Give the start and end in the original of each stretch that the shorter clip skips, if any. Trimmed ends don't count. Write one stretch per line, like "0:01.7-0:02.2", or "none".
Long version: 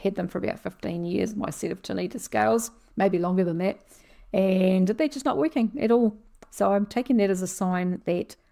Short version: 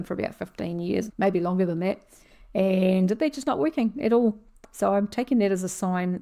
0:01.3-0:02.9